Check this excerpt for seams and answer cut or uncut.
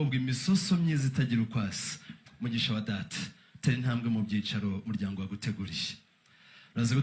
uncut